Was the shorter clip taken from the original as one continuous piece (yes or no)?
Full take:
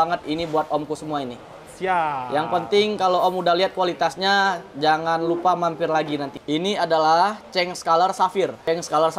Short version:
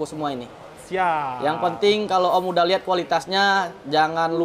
yes